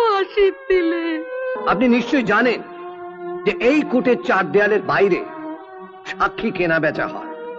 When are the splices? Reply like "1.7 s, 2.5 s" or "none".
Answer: 1.6 s